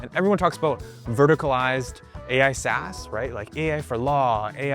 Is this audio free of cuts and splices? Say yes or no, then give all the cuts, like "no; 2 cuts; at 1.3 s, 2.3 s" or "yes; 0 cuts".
yes; 0 cuts